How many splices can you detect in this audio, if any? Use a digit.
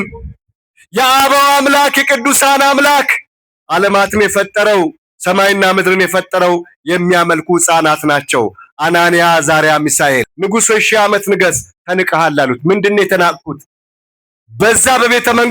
1